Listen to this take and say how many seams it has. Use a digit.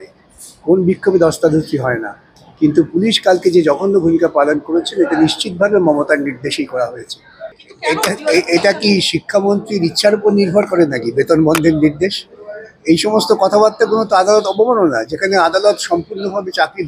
1